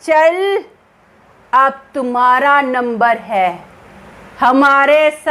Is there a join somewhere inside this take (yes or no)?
no